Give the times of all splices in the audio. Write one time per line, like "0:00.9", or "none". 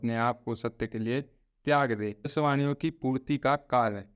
0:02.3

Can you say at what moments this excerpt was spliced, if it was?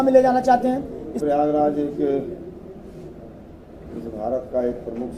0:01.2

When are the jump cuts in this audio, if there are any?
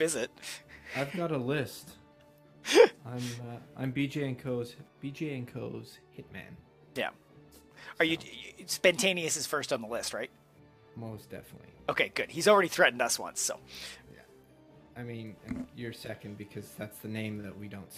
none

